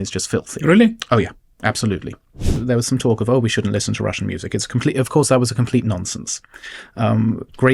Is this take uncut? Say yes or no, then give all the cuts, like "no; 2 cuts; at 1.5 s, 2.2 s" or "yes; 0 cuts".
no; 1 cut; at 2.6 s